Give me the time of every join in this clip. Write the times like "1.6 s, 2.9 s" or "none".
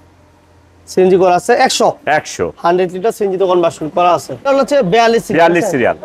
4.5 s